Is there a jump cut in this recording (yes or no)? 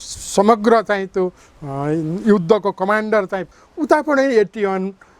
yes